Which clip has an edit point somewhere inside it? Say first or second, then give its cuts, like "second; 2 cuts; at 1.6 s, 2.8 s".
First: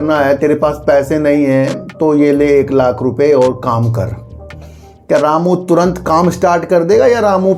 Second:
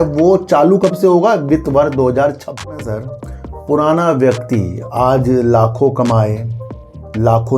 second; 1 cut; at 2.7 s